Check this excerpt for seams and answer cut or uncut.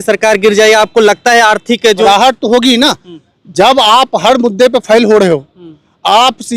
cut